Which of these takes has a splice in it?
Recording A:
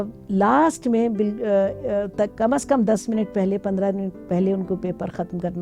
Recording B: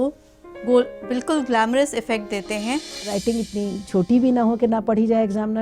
B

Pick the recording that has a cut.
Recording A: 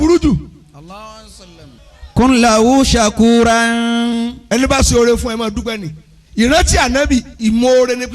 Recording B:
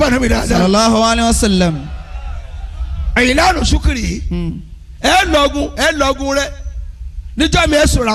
A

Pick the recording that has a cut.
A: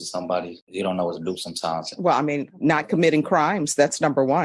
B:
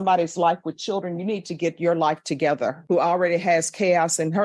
B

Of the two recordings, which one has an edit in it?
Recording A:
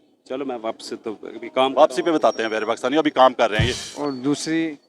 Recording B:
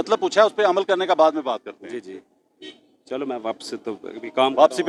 A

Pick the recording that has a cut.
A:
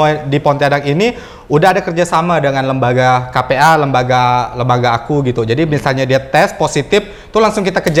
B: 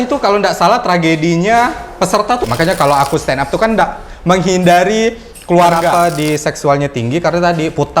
B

